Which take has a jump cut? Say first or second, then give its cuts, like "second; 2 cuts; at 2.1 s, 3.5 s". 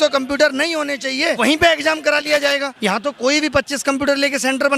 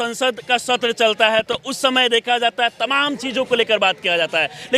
first; 2 cuts; at 1.4 s, 2.7 s